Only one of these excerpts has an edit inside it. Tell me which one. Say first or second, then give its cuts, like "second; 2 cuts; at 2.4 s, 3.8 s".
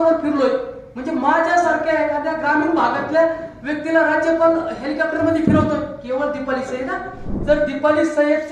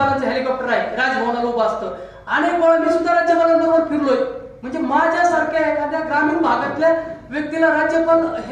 first; 1 cut; at 7.3 s